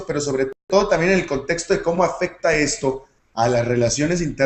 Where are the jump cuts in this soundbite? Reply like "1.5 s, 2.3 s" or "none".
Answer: 3.6 s